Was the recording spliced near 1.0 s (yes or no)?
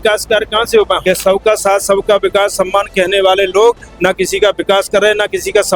yes